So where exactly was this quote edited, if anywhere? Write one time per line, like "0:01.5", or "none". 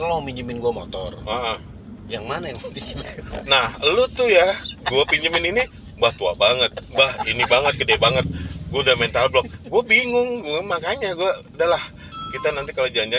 none